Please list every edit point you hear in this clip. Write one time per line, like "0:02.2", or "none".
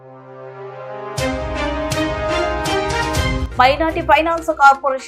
none